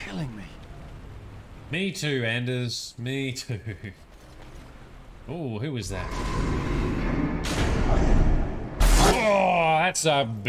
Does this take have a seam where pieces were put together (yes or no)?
no